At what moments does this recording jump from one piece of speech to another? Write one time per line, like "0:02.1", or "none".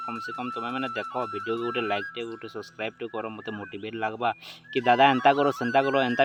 none